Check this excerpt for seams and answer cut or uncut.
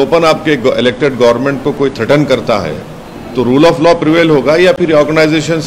uncut